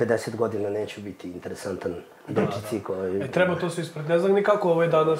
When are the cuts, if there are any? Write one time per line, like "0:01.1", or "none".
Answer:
none